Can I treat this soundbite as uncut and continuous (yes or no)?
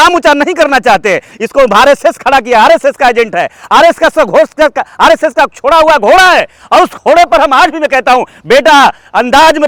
yes